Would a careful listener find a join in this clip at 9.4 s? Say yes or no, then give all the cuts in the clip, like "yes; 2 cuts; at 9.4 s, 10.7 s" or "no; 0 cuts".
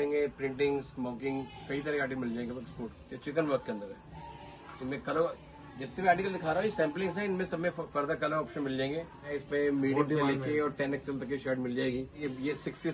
yes; 3 cuts; at 3.0 s, 9.4 s, 12.2 s